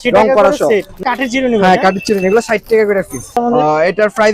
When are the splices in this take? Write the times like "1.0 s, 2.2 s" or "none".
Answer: 0.9 s, 3.4 s